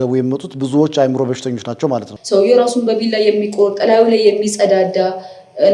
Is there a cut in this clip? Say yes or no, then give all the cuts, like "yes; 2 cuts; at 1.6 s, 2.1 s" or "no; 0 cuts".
yes; 1 cut; at 2.1 s